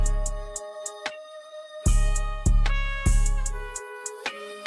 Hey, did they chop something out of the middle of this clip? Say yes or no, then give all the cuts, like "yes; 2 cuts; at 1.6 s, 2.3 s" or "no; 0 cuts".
no; 0 cuts